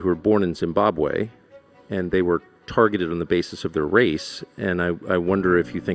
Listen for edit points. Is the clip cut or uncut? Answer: uncut